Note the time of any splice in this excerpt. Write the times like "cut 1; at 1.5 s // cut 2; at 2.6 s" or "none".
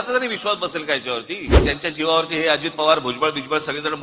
cut 1; at 1.6 s